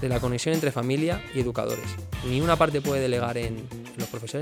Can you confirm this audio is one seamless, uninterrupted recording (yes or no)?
yes